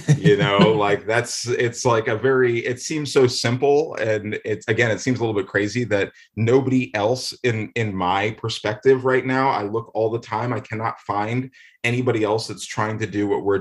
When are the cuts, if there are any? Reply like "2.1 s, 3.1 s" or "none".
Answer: none